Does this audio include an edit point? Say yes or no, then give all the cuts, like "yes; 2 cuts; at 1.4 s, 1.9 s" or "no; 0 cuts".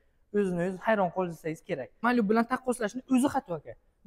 yes; 1 cut; at 2.0 s